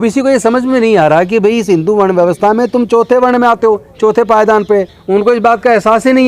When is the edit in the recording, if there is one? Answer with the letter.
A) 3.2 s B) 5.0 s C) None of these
B